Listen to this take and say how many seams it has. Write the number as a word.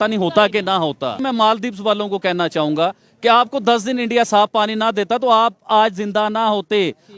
one